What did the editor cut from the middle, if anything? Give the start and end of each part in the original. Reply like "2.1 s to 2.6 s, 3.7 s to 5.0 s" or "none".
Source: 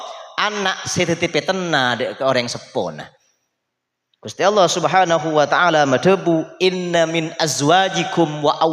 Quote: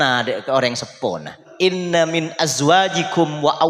3.2 s to 6.5 s